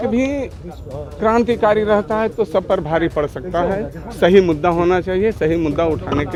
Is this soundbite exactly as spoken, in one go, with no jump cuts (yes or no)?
yes